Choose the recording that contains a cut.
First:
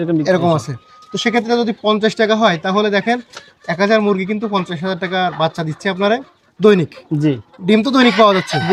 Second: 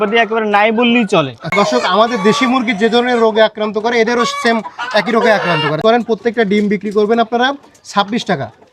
second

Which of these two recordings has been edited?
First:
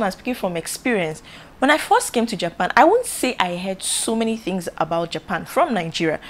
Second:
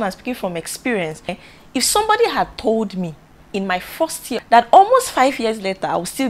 second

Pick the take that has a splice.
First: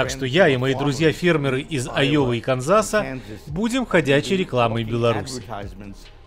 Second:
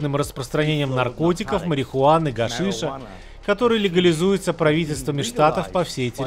first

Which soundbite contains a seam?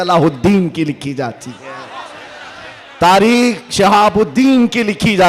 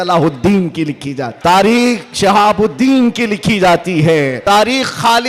second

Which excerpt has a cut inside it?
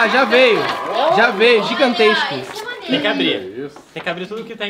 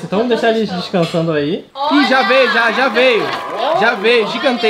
second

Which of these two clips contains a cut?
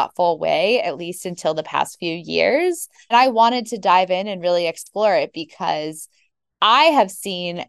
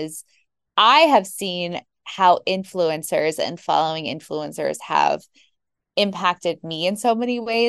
first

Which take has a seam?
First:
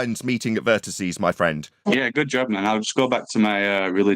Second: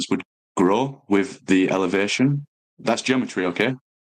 first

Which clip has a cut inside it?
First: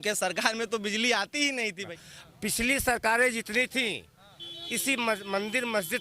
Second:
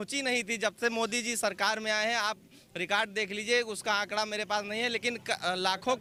first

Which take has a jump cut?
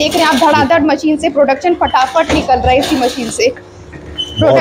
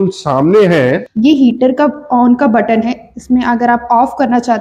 second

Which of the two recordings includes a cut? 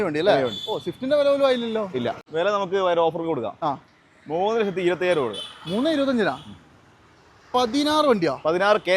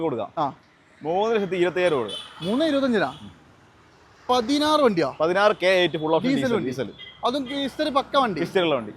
first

